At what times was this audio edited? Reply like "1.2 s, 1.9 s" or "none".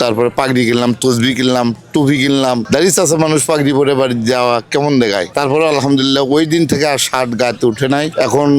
none